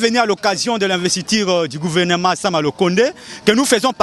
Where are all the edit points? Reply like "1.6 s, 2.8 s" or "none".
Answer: none